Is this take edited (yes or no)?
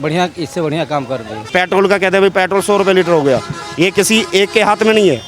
yes